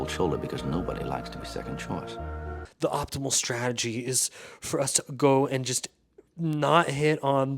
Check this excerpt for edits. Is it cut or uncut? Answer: cut